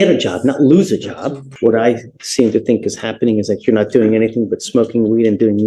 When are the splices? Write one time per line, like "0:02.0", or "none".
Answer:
0:01.5

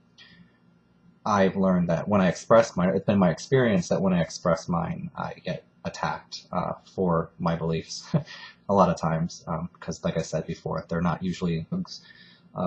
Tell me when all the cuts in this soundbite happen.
none

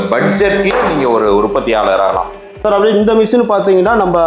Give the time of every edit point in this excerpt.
0:02.5

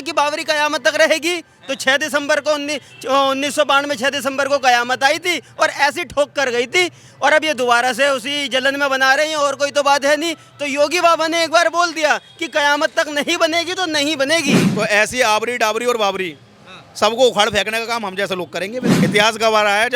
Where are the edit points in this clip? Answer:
0:14.6
0:18.9

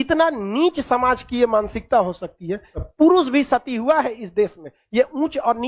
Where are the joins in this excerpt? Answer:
0:02.7

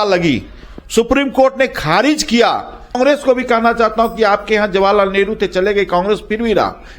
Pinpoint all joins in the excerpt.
0:03.0

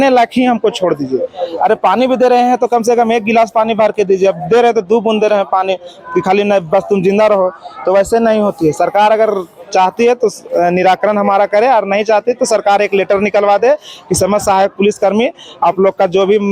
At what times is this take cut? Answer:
none

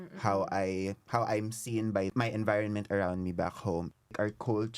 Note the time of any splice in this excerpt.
0:01.0
0:02.1
0:03.9

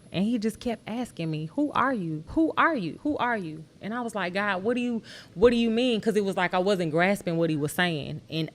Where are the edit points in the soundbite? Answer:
0:02.2
0:03.0

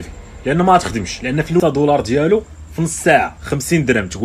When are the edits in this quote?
0:01.6

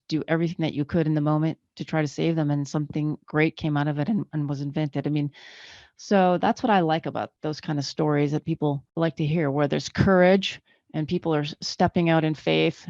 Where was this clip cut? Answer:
0:07.3
0:08.9

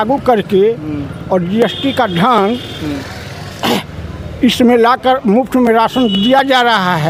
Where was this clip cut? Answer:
none

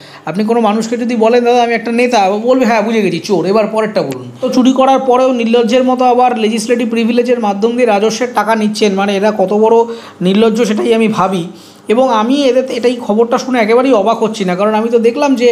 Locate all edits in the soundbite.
0:04.4

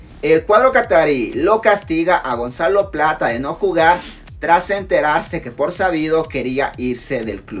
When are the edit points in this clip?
none

